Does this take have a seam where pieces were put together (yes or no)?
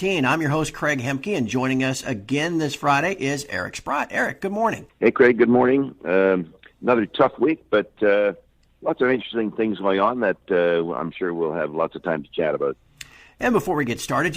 no